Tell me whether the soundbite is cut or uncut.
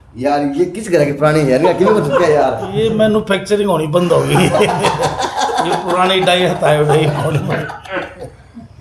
uncut